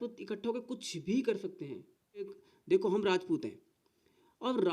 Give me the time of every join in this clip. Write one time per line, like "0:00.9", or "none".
0:02.4